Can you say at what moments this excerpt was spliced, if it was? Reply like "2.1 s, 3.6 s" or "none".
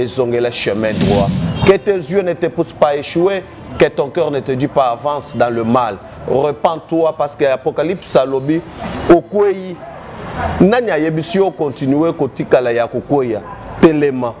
1.4 s